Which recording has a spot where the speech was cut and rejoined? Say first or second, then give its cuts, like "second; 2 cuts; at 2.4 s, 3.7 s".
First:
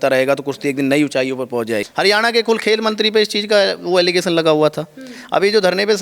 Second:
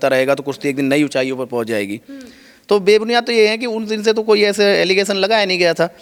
first; 1 cut; at 1.9 s